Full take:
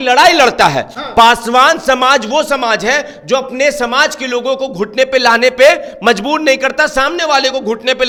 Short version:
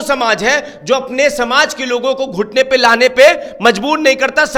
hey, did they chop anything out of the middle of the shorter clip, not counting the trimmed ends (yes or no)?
no